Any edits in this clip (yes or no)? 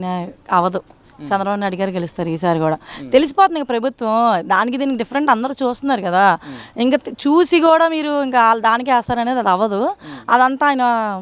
no